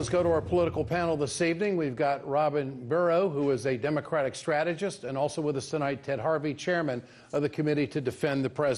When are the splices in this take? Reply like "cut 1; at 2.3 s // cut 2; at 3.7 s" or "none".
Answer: none